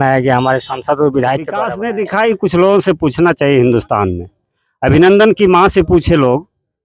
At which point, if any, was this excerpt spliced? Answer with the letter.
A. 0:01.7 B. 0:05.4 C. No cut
A